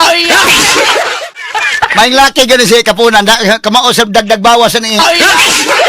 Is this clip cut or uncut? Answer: cut